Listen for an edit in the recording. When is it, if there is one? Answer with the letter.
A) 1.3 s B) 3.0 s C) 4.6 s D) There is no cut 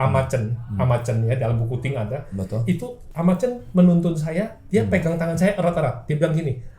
B